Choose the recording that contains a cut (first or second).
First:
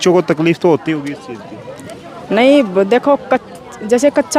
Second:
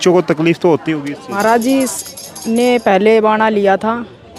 second